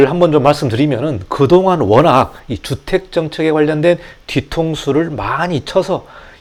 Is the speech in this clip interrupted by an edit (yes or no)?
no